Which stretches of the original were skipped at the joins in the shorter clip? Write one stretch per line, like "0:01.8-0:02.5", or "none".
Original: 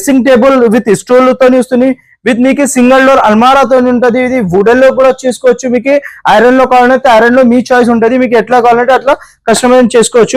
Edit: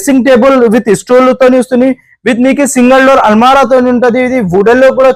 none